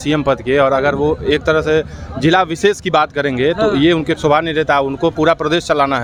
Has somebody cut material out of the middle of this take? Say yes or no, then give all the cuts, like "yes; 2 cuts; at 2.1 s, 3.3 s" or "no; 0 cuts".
no; 0 cuts